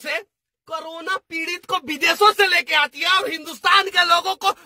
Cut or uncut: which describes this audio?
uncut